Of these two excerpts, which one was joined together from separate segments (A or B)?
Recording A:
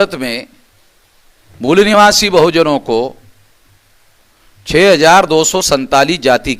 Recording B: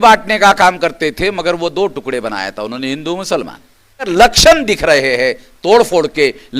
B